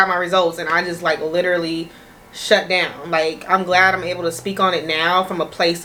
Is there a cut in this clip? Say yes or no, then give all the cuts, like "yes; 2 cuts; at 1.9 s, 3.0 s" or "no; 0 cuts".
no; 0 cuts